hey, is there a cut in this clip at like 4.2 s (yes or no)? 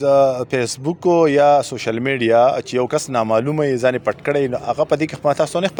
no